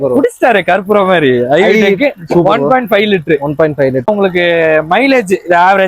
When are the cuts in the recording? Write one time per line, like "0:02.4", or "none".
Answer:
0:04.1

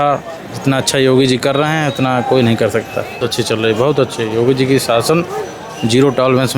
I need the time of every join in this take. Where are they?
0:03.1

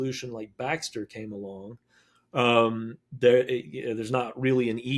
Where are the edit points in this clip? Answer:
none

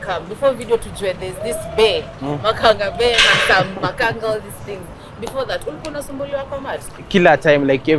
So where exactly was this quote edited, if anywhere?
0:07.0

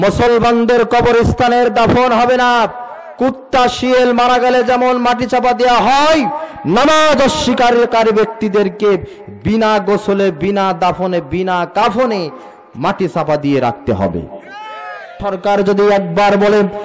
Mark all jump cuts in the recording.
0:15.3

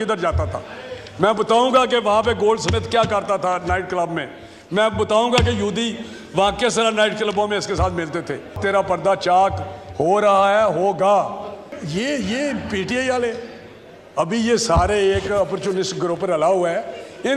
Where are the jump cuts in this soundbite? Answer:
0:08.5
0:11.7

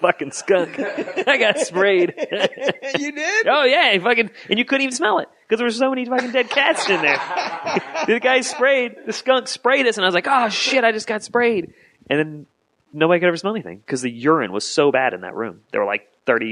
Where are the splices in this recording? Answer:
0:13.6

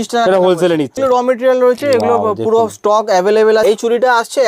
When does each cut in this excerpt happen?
0:00.9
0:03.6

